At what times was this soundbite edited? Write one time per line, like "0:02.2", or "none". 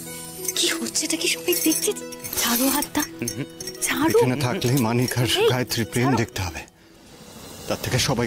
0:02.0